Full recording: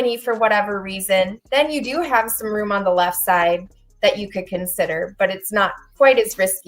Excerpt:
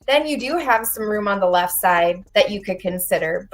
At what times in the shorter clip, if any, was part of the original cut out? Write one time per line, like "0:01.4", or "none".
0:02.2

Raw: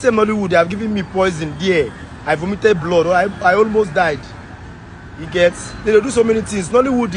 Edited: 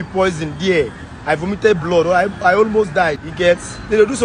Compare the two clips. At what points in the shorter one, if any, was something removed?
0:03.2

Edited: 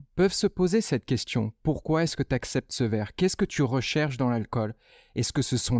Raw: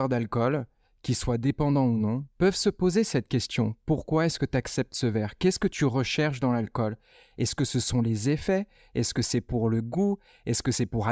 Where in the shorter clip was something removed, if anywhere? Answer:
none

